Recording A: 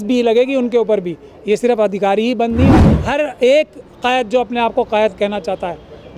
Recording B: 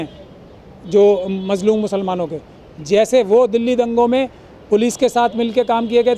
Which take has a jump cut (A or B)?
A